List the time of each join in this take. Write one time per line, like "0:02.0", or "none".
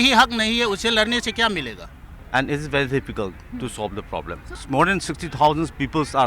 0:02.1
0:04.5